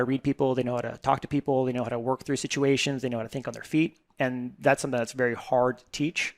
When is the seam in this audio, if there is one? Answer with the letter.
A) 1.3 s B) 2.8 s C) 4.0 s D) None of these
D